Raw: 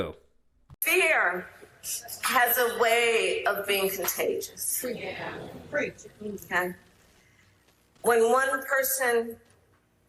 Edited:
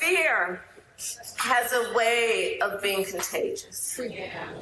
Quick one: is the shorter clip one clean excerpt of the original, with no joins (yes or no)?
yes